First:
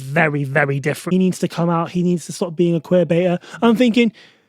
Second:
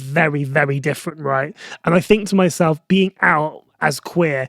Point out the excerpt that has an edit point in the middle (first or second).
first